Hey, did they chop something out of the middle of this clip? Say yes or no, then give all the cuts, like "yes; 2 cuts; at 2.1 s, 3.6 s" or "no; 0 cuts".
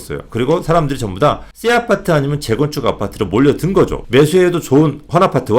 yes; 2 cuts; at 1.5 s, 4.0 s